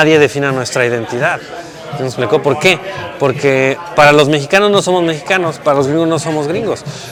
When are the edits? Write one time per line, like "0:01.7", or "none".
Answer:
none

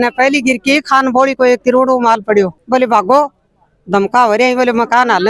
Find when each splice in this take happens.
0:02.6

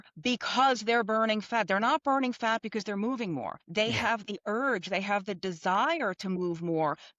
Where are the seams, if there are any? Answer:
0:03.6

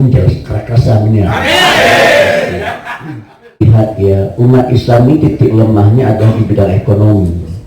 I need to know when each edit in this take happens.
0:03.6

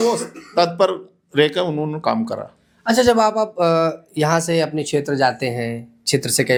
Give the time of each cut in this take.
none

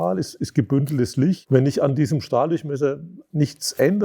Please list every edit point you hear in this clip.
0:01.4

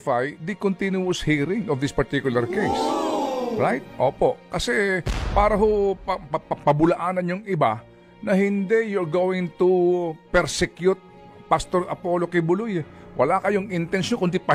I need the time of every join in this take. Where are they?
none

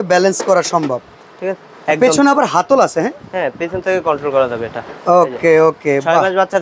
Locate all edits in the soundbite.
none

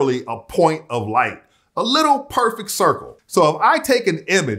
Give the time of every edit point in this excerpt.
0:03.1

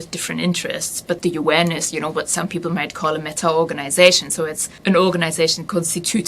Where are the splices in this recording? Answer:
0:01.2
0:04.7

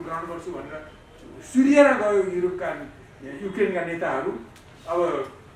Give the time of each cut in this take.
none

